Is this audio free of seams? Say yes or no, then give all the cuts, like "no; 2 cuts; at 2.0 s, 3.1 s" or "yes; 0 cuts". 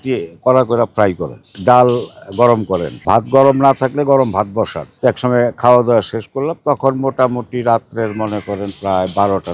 no; 3 cuts; at 1.5 s, 2.9 s, 4.8 s